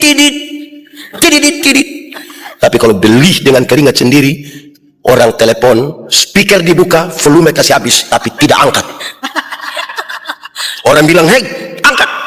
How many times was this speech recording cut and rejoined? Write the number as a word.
zero